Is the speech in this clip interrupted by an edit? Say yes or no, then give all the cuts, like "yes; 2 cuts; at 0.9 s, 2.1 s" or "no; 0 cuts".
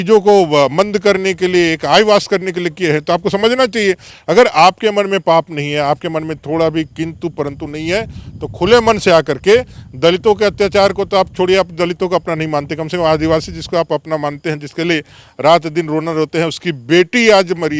no; 0 cuts